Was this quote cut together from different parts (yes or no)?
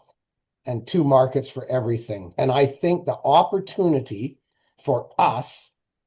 yes